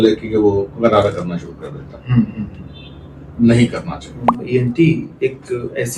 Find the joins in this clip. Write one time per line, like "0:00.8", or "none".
0:04.3